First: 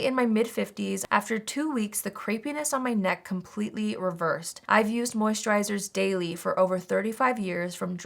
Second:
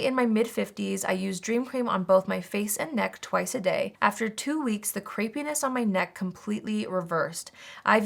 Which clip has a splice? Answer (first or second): first